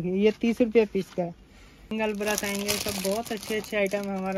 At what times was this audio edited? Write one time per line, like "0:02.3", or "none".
0:01.9